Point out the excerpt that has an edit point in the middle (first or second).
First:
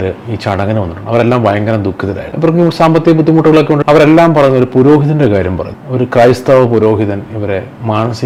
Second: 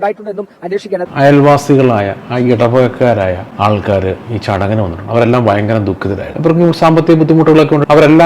second